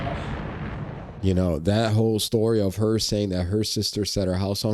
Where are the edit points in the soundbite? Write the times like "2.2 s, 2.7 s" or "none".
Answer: 1.1 s